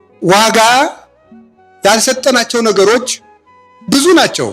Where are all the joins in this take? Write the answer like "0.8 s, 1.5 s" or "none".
none